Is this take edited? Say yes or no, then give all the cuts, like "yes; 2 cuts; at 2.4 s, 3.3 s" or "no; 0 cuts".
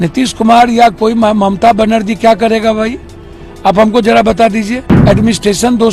yes; 1 cut; at 4.8 s